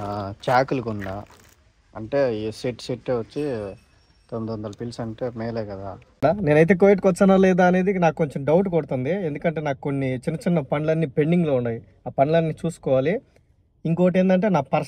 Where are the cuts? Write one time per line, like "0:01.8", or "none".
0:06.2

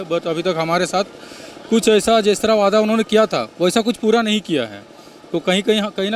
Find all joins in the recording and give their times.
none

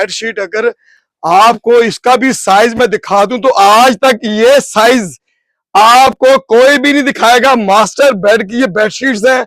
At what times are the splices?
none

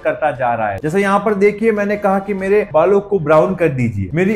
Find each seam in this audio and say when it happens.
0:00.9

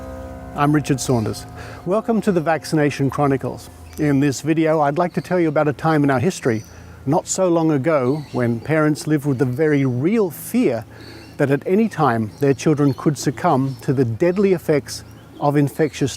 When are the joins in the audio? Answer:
0:04.7

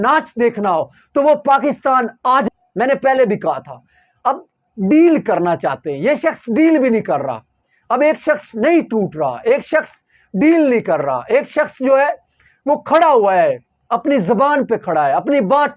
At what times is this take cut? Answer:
0:02.5

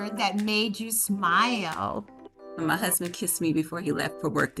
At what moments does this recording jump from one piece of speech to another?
none

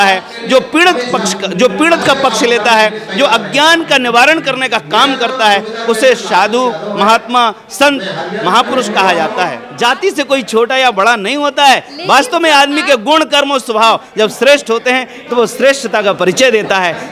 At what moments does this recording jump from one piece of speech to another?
0:09.6

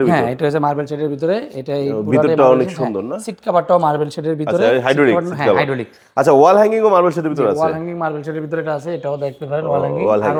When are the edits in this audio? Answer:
none

